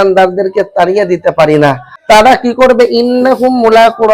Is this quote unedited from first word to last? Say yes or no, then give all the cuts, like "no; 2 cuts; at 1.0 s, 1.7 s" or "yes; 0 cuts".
no; 1 cut; at 1.9 s